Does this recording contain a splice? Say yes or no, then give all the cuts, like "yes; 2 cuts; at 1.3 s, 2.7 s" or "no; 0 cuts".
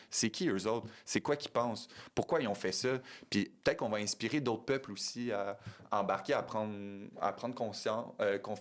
no; 0 cuts